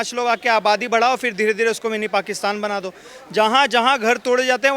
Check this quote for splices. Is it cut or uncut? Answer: uncut